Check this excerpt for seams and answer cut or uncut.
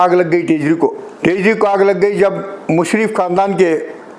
cut